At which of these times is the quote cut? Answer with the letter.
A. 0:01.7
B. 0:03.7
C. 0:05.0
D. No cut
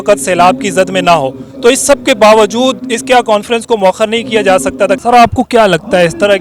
C